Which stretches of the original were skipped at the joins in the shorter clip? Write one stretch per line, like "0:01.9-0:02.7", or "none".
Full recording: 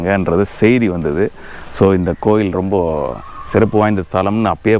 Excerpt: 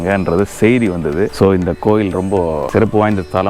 0:01.3-0:01.7
0:03.0-0:03.4